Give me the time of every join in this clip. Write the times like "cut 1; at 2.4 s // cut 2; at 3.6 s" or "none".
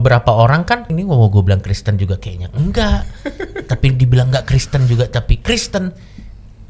cut 1; at 0.9 s